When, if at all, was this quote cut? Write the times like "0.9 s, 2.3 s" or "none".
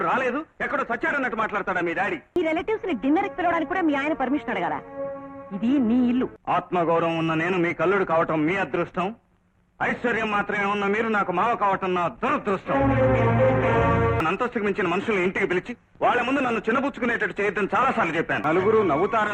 2.4 s, 6.4 s, 14.2 s, 18.4 s